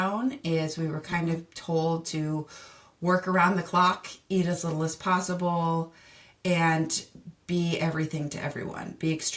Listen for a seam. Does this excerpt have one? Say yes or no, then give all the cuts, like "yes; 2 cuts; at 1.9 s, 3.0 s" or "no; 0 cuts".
no; 0 cuts